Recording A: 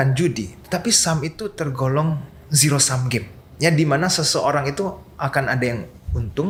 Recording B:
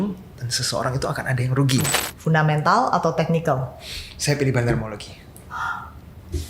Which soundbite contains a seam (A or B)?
B